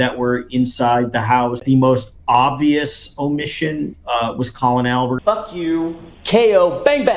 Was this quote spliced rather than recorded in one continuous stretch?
yes; 1 cut; at 1.6 s

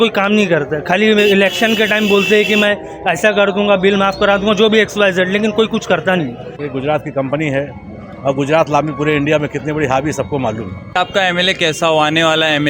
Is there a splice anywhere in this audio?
yes; 2 cuts; at 6.6 s, 10.9 s

